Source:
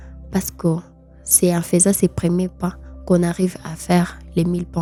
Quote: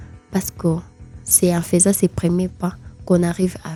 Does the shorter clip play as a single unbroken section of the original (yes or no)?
yes